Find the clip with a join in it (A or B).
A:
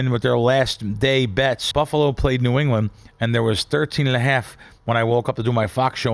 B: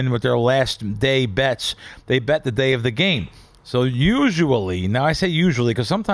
A